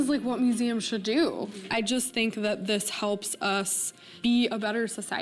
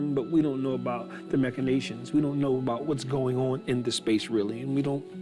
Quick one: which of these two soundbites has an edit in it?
first; 1 cut; at 1.6 s

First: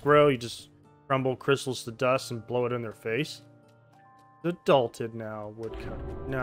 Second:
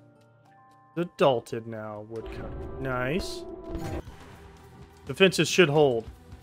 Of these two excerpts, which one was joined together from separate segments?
second; 1 cut; at 4.0 s

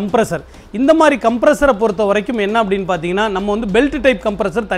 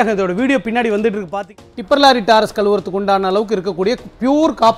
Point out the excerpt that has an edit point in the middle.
second; 1 cut; at 1.4 s

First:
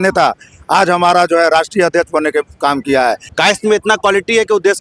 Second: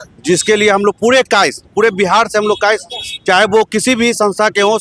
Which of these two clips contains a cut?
first; 1 cut; at 3.3 s

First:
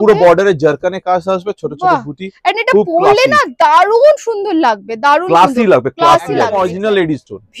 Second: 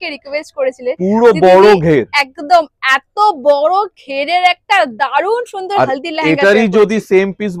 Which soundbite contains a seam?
first; 1 cut; at 6.5 s

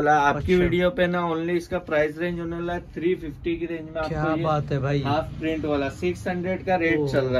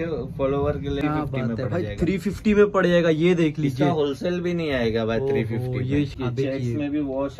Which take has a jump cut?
second; 2 cuts; at 1.0 s, 6.1 s

